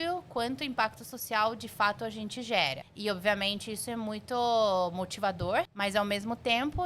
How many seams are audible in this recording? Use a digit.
2